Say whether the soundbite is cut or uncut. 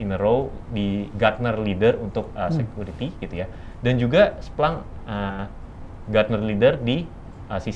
uncut